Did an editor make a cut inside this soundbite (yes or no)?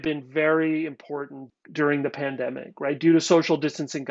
yes